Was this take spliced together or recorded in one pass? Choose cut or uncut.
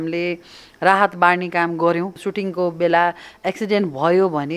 cut